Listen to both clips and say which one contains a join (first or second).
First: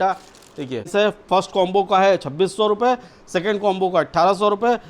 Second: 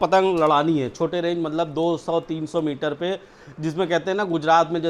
first